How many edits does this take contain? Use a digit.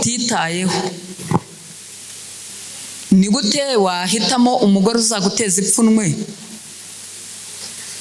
0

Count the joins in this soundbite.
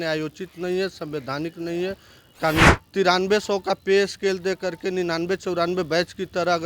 1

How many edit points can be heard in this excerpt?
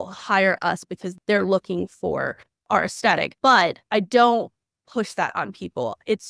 3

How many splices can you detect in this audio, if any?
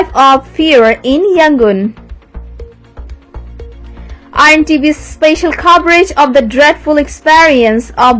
2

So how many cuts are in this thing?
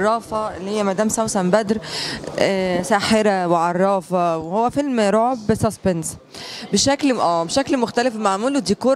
0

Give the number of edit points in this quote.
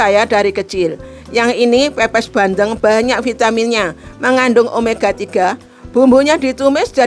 0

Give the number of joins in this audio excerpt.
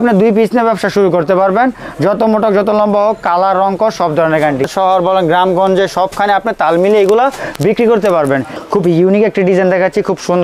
2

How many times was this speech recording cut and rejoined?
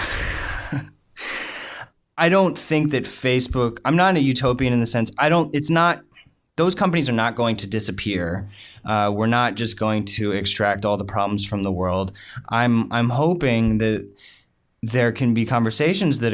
1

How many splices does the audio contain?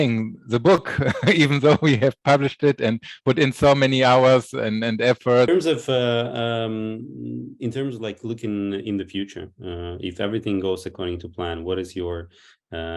1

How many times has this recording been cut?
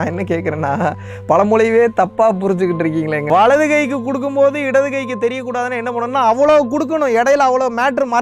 1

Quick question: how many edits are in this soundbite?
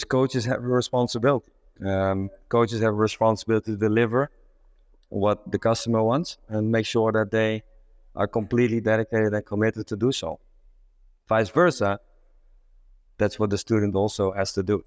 0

